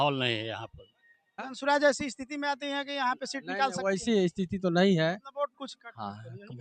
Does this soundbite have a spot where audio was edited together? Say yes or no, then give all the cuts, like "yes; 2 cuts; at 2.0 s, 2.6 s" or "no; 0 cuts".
yes; 1 cut; at 1.5 s